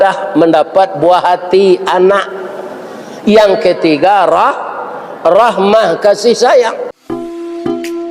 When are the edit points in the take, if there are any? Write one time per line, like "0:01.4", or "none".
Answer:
0:06.9